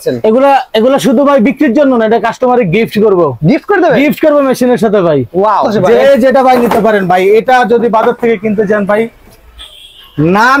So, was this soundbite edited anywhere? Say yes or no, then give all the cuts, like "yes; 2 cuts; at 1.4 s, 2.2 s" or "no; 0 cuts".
yes; 1 cut; at 5.7 s